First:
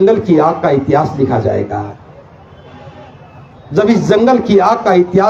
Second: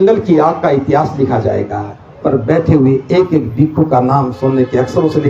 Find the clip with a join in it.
second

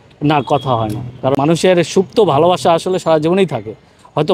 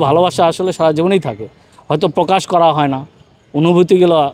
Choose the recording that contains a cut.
first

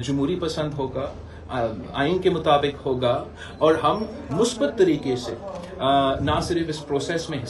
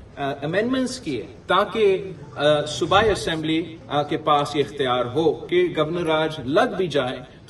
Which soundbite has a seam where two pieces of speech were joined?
second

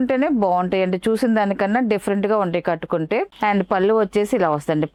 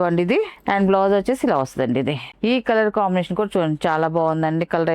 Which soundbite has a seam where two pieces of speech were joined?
second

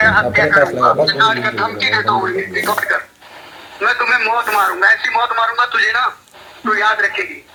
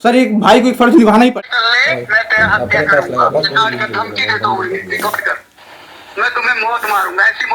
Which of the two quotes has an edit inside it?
second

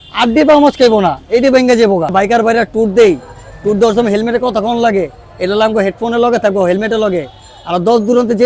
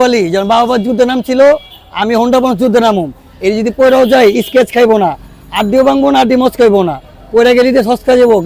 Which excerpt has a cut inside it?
first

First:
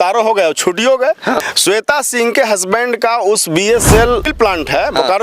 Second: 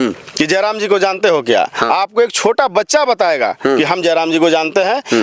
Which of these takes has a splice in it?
first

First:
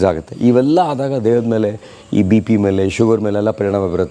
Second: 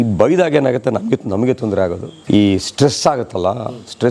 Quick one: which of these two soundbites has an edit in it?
second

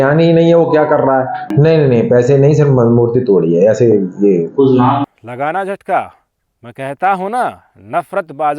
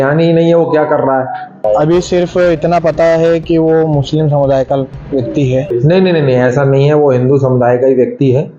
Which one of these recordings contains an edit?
second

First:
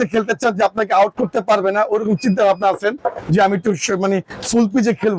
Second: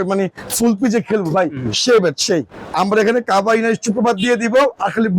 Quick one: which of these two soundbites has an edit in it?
second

